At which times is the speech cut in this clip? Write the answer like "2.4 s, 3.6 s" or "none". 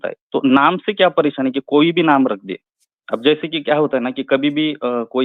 none